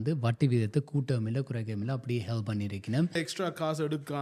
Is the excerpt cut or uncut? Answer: cut